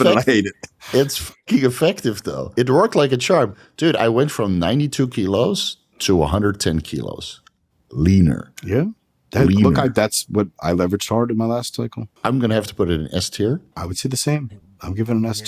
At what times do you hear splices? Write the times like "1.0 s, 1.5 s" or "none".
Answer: 2.3 s, 8.5 s, 12.0 s, 13.7 s